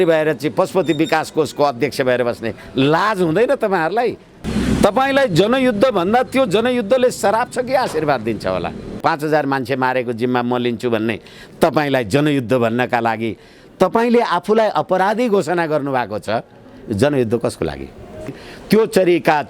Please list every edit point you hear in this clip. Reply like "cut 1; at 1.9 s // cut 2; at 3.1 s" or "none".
cut 1; at 4.3 s // cut 2; at 9.0 s // cut 3; at 18.5 s